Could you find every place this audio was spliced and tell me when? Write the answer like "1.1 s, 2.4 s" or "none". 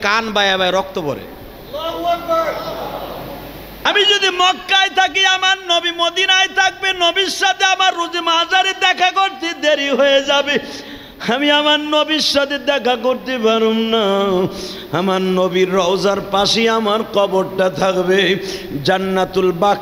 3.9 s